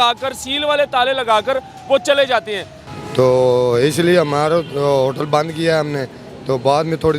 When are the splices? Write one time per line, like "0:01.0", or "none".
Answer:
0:02.7